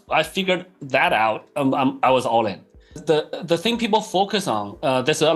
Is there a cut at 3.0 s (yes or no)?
yes